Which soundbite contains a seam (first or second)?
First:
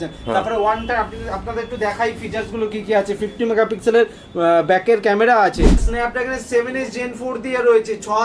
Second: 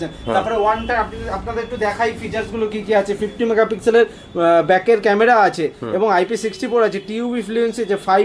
first